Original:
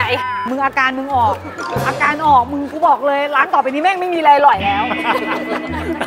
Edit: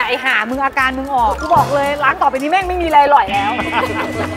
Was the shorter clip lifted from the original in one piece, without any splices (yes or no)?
no